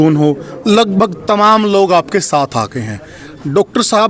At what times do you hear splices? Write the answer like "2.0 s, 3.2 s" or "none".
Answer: none